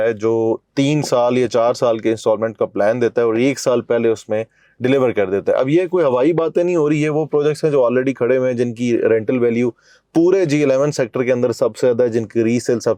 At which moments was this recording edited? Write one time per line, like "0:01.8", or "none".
none